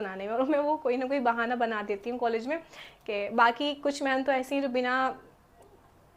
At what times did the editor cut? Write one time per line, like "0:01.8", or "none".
none

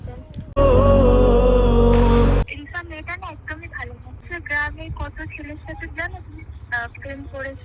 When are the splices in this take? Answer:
0:02.5
0:04.2

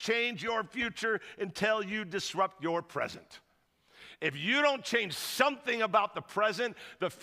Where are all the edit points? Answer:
none

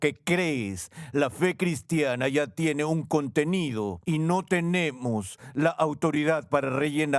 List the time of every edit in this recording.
0:04.0

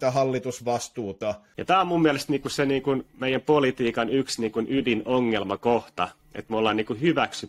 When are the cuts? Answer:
0:01.5

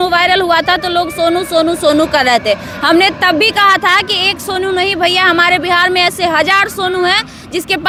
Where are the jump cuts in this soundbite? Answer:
none

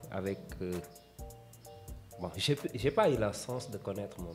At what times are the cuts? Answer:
none

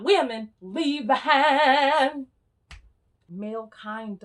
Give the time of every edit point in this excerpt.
0:03.2

